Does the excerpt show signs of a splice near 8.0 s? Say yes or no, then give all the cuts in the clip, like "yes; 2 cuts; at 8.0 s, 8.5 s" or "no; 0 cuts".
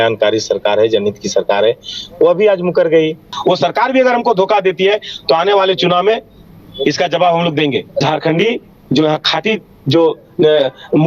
yes; 2 cuts; at 3.3 s, 8.0 s